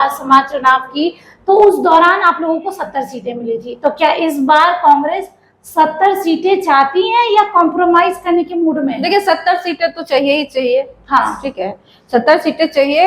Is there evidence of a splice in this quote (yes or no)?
no